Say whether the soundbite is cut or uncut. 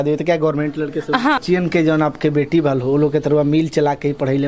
cut